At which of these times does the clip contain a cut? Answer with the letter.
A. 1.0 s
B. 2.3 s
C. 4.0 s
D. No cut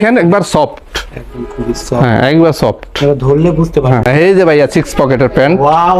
C